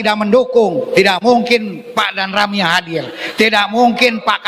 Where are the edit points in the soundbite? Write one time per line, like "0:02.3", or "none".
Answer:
0:01.8